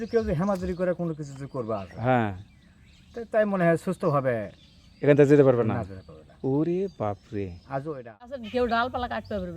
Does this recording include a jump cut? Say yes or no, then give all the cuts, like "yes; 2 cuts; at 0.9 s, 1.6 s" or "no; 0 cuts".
yes; 1 cut; at 8.4 s